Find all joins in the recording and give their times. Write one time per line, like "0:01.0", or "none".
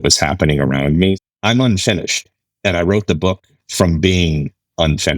0:01.2